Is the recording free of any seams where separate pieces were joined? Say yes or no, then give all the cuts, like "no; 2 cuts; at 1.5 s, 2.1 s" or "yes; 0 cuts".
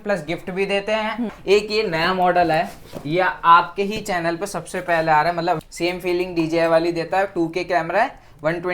no; 2 cuts; at 1.4 s, 5.6 s